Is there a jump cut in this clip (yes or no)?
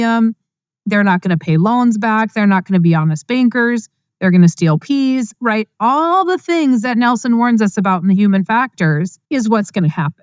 yes